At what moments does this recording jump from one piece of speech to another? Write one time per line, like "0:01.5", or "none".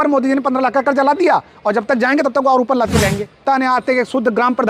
0:03.4